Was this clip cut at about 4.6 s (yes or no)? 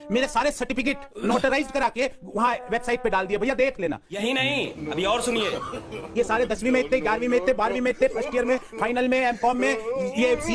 no